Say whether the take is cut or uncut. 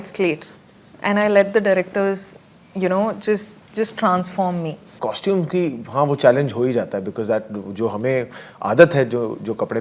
cut